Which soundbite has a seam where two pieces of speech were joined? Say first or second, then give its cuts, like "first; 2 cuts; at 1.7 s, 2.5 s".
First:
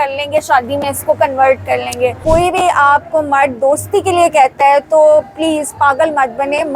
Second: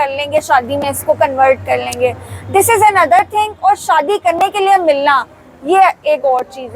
first; 1 cut; at 2.2 s